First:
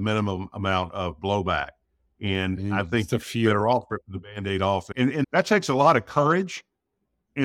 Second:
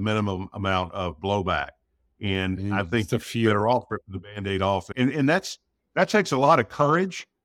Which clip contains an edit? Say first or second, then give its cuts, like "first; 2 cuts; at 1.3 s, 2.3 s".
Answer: first; 1 cut; at 5.2 s